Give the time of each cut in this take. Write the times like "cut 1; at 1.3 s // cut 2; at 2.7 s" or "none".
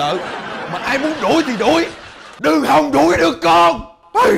none

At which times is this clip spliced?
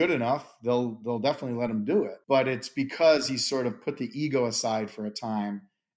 cut 1; at 2.2 s

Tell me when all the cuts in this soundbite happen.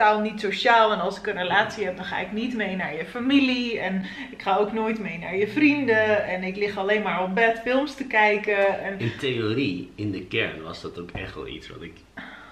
none

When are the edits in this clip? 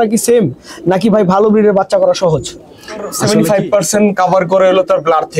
cut 1; at 3.2 s

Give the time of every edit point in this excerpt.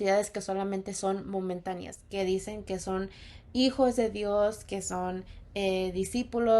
cut 1; at 1.9 s

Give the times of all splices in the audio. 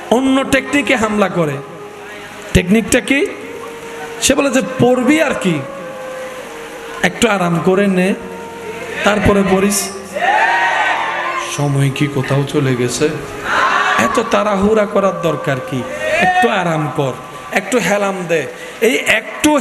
none

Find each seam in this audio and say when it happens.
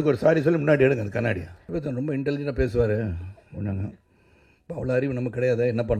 cut 1; at 1.5 s

